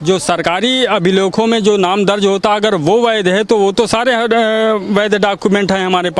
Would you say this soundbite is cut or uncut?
uncut